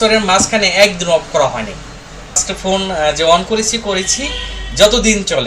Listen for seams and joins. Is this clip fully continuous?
no; 1 cut; at 2.5 s

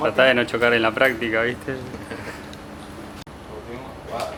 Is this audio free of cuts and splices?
yes; 0 cuts

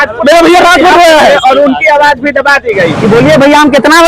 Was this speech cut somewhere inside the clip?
yes; 1 cut; at 3.0 s

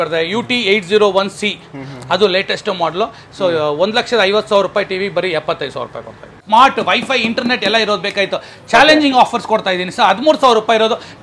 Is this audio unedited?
no; 1 cut; at 6.4 s

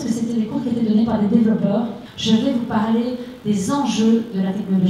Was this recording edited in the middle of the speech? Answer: yes; 1 cut; at 2.0 s

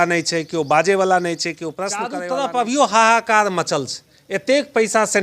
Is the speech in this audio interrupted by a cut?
yes; 1 cut; at 2.2 s

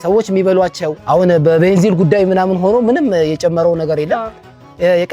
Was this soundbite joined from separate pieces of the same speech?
yes; 1 cut; at 1.0 s

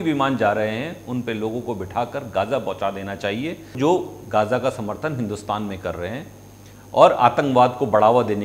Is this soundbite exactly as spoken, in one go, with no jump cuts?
no; 1 cut; at 3.7 s

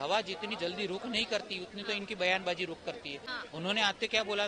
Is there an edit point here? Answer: yes; 1 cut; at 3.2 s

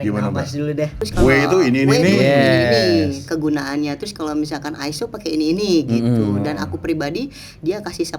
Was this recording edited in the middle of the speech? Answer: yes; 1 cut; at 1.0 s

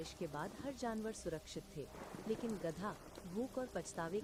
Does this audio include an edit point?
no; 0 cuts

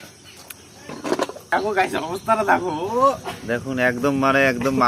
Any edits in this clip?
yes; 1 cut; at 1.5 s

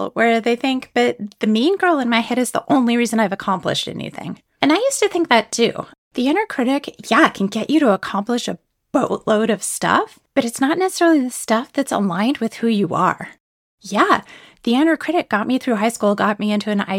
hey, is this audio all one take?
no; 1 cut; at 5.9 s

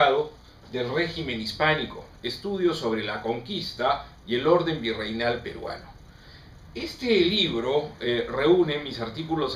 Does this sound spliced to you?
yes; 1 cut; at 8.6 s

